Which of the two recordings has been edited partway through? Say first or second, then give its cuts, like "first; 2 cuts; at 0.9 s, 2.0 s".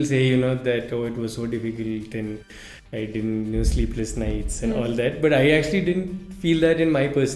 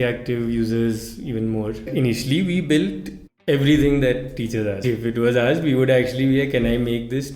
second; 2 cuts; at 1.8 s, 4.8 s